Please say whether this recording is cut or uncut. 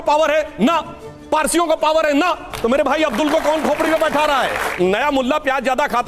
cut